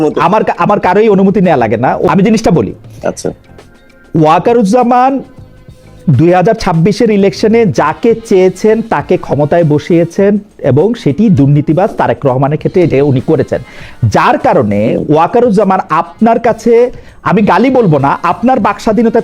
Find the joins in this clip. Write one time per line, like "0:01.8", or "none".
0:02.1